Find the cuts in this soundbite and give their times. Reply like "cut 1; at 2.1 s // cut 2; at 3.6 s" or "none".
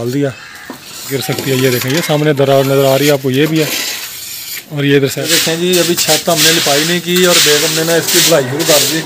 cut 1; at 1.1 s // cut 2; at 5.2 s